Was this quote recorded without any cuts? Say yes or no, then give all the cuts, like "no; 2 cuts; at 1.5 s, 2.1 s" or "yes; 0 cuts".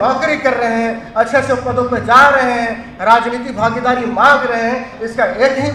yes; 0 cuts